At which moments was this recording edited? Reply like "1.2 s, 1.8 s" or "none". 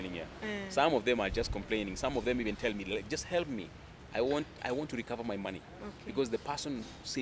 none

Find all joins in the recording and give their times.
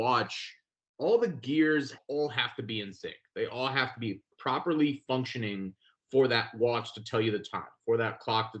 2.0 s, 4.3 s

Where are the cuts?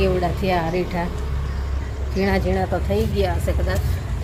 none

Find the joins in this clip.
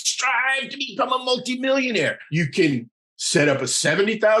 2.2 s

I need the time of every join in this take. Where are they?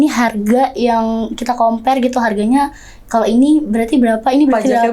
none

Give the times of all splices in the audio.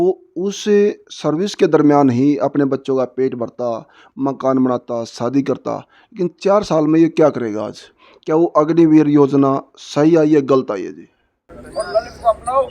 11.6 s

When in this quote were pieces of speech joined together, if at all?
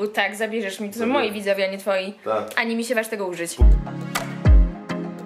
3.5 s

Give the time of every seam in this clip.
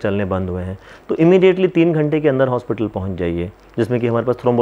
none

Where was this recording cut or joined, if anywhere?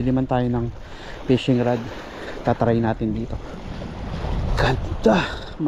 none

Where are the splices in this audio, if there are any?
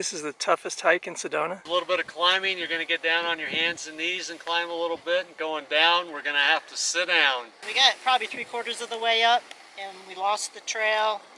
1.6 s, 7.6 s

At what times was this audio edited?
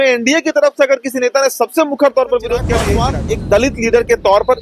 2.9 s

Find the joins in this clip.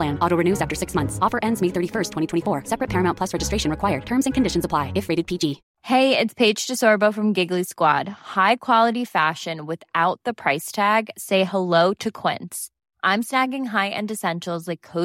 5.7 s

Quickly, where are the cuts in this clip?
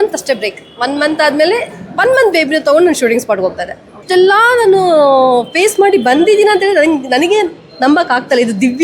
4.0 s

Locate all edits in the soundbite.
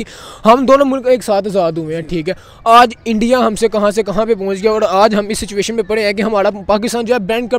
none

